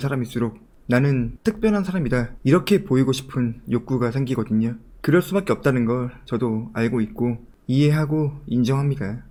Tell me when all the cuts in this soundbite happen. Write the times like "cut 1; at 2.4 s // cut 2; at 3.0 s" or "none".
none

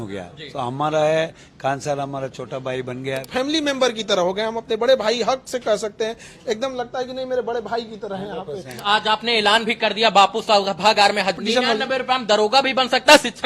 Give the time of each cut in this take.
cut 1; at 3.3 s // cut 2; at 8.7 s // cut 3; at 11.4 s

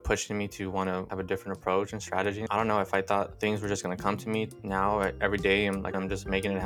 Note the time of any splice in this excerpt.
cut 1; at 1.1 s // cut 2; at 2.4 s // cut 3; at 3.3 s // cut 4; at 4.5 s // cut 5; at 5.9 s

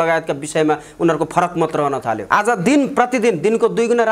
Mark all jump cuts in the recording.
cut 1; at 2.2 s

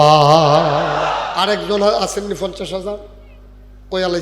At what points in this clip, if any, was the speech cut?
cut 1; at 1.3 s

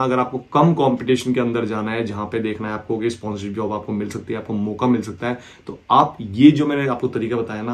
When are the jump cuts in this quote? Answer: none

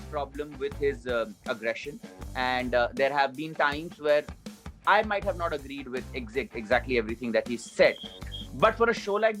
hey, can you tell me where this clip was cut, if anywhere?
none

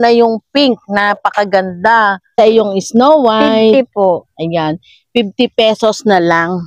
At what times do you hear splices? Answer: cut 1; at 2.4 s

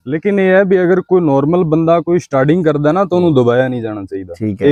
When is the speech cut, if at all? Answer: none

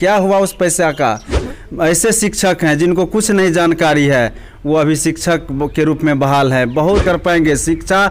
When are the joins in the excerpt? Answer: cut 1; at 1.5 s // cut 2; at 7.0 s

